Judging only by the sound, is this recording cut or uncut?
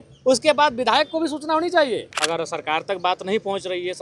cut